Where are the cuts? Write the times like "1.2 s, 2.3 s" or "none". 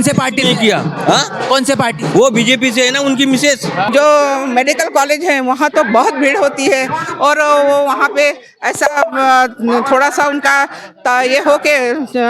3.9 s